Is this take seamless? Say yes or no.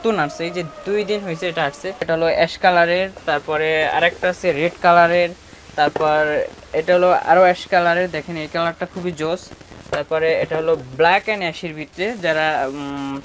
no